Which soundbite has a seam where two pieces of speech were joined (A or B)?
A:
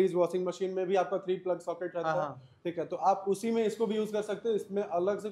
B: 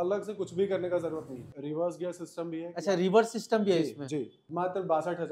B